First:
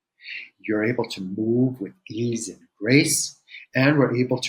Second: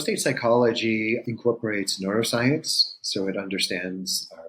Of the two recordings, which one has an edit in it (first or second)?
second